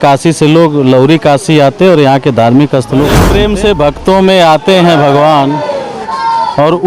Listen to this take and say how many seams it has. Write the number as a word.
one